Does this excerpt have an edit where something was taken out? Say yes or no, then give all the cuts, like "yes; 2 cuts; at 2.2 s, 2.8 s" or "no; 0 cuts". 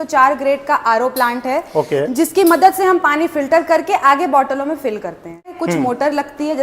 yes; 1 cut; at 5.5 s